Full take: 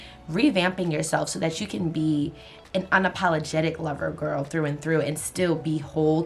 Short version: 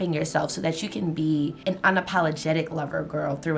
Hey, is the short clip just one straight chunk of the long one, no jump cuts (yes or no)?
no